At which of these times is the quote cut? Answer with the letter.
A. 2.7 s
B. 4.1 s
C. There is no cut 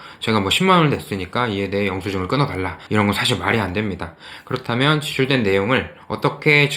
A